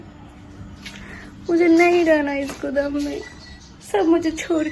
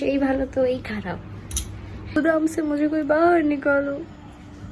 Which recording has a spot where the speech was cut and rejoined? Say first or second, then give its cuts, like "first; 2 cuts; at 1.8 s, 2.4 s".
second; 1 cut; at 2.2 s